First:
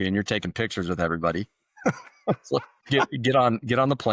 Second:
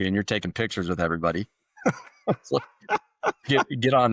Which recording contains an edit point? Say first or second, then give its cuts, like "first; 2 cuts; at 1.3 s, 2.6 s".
first; 1 cut; at 2.8 s